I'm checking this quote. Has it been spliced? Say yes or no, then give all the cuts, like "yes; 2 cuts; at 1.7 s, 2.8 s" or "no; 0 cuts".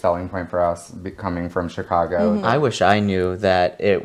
yes; 1 cut; at 2.4 s